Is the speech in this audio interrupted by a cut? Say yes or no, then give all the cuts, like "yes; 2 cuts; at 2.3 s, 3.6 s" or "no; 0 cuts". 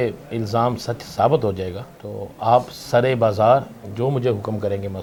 no; 0 cuts